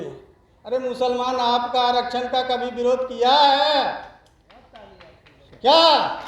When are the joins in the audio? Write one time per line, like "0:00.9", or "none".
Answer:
none